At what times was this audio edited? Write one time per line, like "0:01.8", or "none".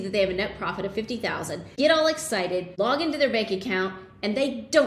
0:01.6
0:02.7